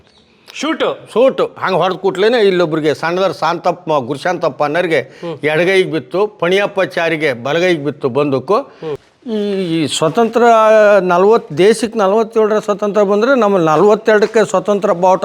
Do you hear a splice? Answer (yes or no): yes